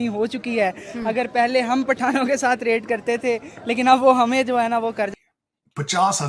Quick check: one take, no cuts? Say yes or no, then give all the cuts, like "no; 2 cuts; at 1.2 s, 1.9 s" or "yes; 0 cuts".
no; 1 cut; at 5.1 s